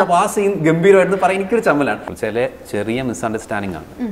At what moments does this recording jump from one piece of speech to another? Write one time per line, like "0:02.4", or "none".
0:02.0